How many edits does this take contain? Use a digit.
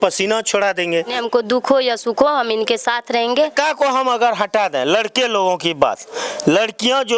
2